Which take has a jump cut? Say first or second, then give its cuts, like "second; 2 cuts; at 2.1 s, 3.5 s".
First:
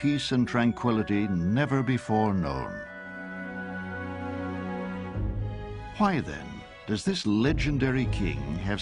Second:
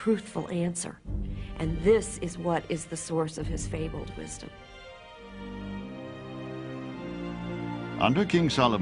second; 1 cut; at 4.5 s